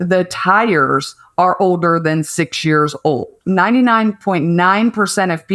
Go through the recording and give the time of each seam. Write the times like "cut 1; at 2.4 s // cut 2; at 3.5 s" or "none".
cut 1; at 3.3 s

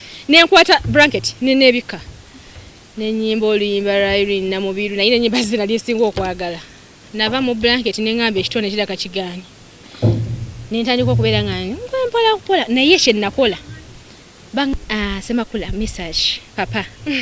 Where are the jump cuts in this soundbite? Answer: cut 1; at 14.7 s

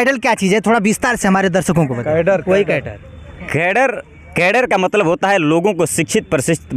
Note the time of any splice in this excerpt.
none

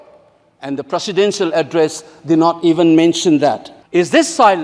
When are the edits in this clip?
cut 1; at 3.7 s

